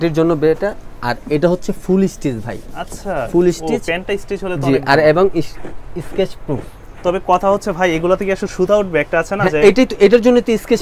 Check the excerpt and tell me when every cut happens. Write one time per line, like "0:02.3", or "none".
none